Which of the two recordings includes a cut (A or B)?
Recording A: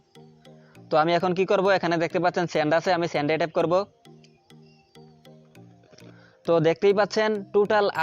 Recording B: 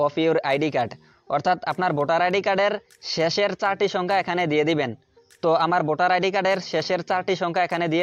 A